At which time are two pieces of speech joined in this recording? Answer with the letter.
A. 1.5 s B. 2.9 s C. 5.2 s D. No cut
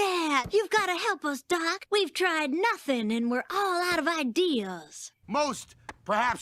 C